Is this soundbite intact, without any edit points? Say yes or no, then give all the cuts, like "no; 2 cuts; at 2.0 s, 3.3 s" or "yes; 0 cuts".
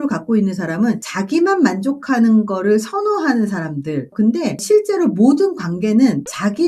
no; 1 cut; at 4.1 s